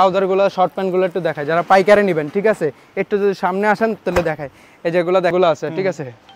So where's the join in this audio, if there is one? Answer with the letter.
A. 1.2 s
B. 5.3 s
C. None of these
B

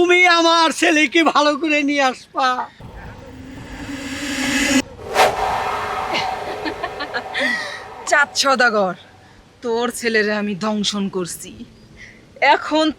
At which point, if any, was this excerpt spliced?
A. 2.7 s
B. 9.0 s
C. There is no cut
A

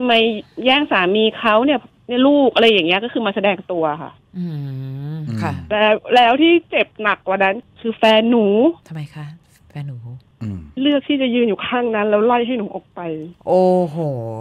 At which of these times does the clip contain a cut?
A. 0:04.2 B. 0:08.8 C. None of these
B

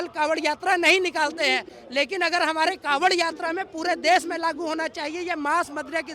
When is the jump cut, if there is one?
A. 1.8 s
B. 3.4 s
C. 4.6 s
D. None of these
A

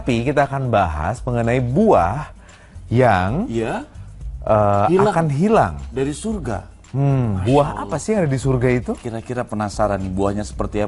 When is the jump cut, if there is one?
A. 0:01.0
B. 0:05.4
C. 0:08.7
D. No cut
B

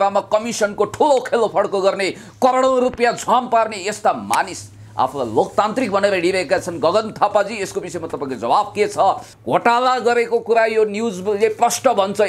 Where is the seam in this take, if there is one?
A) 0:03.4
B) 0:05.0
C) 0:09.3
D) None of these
C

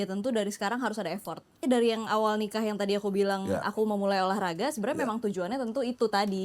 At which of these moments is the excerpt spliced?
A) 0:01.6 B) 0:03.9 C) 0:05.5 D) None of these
A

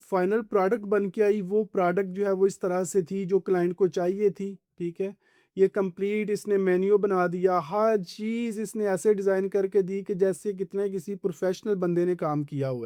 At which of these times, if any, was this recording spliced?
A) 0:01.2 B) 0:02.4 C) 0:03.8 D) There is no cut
D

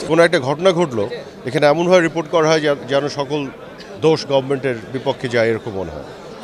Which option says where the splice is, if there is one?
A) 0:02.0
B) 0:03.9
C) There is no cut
C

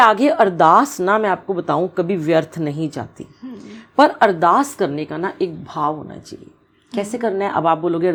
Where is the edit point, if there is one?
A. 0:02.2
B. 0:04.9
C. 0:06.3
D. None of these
D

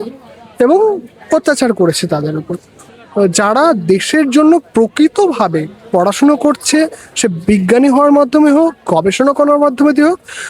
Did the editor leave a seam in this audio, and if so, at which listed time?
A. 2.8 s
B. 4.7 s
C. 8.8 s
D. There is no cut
A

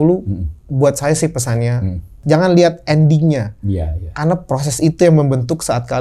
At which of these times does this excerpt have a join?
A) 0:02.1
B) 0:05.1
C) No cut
A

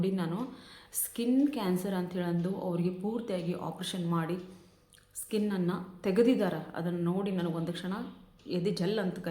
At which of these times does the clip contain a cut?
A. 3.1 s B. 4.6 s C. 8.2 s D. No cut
D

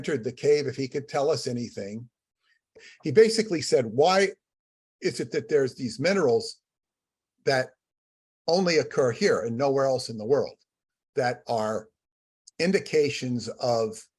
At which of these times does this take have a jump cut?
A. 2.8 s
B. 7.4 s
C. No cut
A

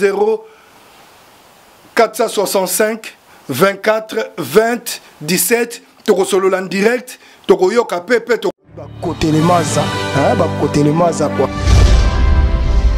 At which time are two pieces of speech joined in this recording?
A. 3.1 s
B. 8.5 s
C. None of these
B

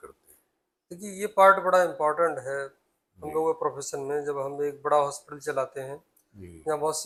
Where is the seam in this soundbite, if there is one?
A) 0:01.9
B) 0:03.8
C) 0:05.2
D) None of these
D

